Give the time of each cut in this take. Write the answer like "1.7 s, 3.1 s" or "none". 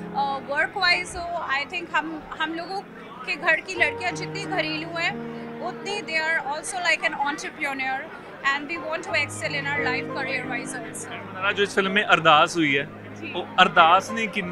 none

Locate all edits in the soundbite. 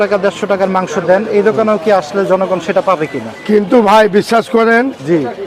none

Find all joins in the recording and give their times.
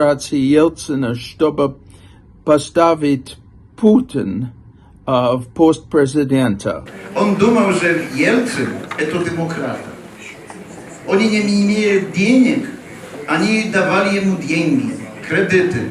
6.9 s

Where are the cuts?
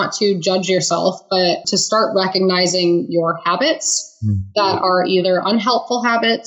1.6 s

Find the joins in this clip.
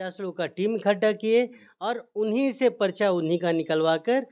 none

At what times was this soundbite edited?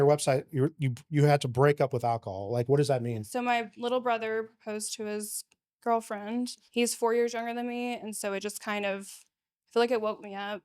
3.2 s, 6.6 s

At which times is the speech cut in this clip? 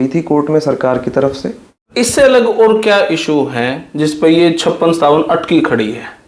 2.1 s

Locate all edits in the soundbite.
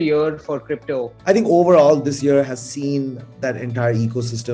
1.1 s

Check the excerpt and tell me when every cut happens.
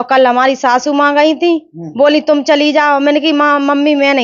none

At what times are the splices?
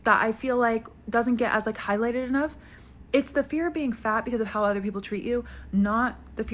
5.4 s

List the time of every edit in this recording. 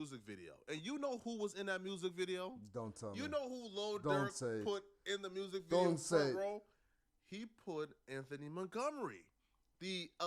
none

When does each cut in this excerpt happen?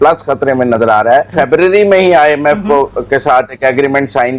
1.3 s

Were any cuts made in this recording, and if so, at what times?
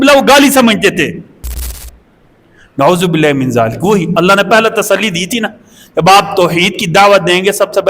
1.7 s

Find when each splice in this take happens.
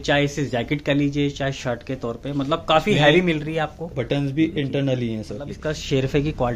5.5 s

